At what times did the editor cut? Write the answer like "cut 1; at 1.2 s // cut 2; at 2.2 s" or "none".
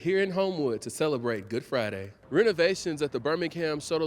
cut 1; at 2.1 s